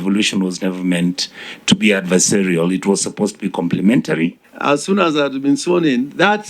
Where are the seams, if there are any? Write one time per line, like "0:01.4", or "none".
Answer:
0:04.5